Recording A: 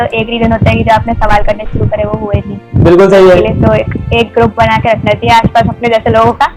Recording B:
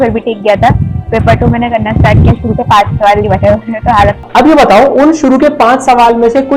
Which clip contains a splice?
B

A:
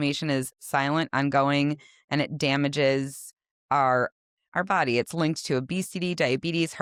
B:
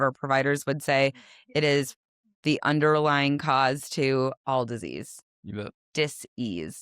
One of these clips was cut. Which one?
B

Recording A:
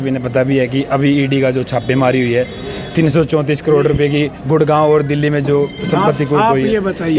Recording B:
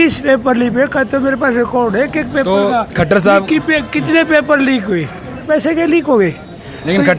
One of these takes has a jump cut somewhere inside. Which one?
B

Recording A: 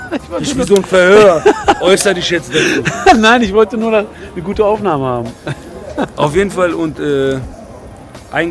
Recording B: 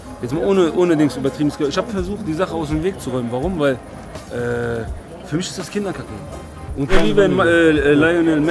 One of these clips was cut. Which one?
B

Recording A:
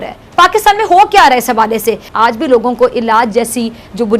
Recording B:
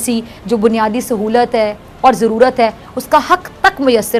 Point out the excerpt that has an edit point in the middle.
A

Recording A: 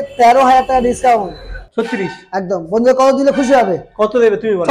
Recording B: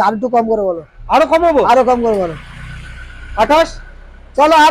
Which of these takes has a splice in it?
A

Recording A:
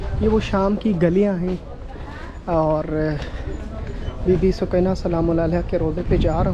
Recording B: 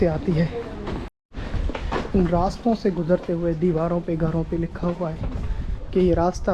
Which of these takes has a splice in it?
B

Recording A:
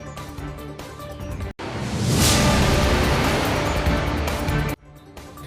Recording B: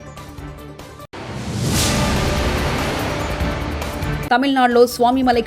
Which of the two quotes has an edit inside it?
A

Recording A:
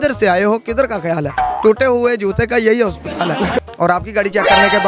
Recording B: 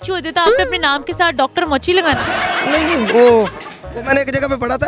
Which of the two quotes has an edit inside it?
A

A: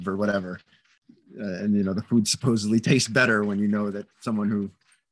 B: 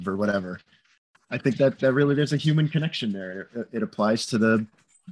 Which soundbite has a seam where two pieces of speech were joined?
B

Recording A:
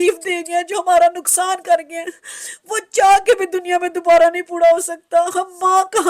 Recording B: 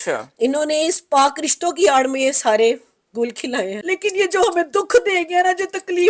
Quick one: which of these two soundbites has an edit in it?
B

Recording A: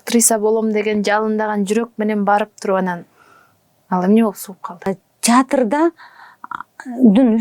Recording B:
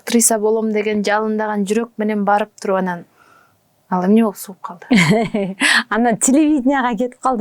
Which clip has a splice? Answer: A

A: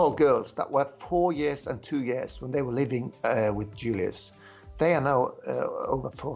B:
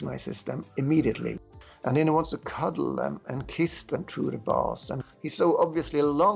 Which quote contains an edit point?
B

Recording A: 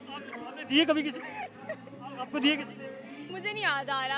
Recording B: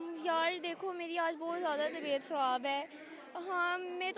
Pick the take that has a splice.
A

